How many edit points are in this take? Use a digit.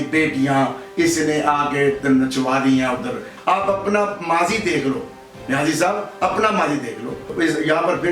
2